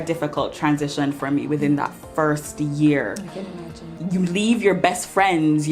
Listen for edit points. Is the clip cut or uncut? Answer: cut